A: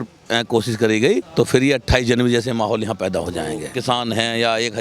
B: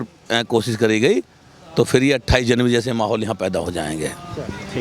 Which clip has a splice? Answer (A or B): A